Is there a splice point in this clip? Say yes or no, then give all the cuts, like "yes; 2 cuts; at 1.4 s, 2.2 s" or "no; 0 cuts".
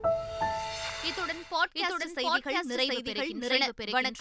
no; 0 cuts